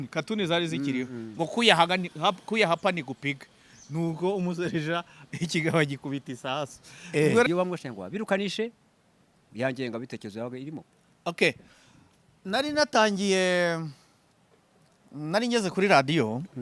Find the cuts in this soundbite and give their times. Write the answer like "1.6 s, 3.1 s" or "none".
7.5 s